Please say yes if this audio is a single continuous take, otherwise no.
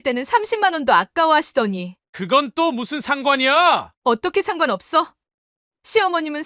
yes